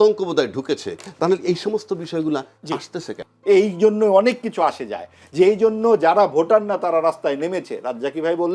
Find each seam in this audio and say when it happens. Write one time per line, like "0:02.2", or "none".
0:03.2